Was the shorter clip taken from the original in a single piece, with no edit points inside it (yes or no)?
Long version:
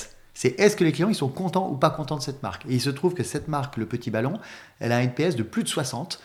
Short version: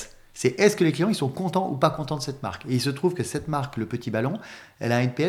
yes